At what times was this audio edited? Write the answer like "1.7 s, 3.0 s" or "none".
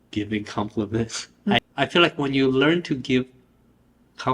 1.6 s